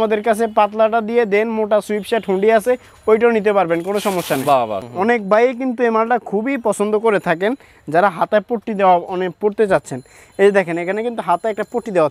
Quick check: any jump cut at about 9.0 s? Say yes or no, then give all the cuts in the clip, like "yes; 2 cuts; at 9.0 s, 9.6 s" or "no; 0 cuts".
no; 1 cut; at 4.8 s